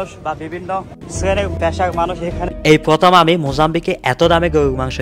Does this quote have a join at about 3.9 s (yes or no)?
no